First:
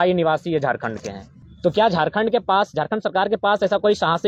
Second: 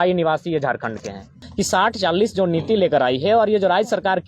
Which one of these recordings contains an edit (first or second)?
second